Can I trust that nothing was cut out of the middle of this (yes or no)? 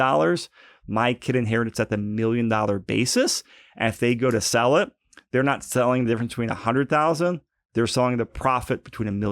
no